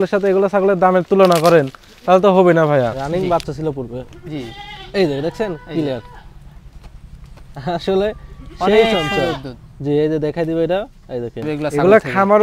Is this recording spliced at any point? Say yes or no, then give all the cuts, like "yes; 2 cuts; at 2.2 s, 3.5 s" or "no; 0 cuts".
yes; 2 cuts; at 3.0 s, 11.5 s